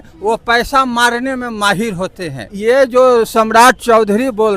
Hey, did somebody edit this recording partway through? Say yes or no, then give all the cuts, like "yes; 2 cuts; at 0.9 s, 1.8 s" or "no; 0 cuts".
yes; 1 cut; at 2.6 s